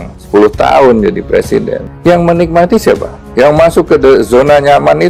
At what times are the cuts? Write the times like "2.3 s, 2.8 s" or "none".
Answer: none